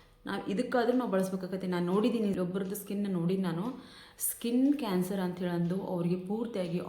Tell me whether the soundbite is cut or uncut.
cut